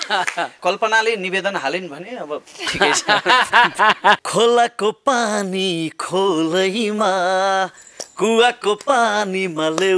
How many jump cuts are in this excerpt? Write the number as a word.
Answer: one